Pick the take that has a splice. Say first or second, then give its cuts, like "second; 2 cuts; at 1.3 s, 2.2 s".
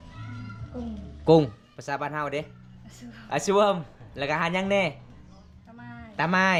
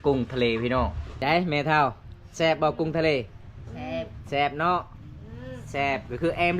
second; 1 cut; at 1.1 s